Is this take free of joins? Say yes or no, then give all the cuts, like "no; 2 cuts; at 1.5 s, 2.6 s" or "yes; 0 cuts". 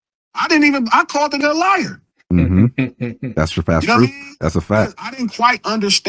no; 1 cut; at 1.4 s